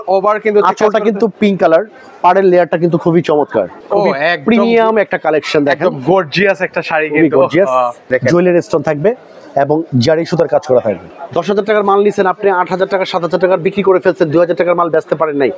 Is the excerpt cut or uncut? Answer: cut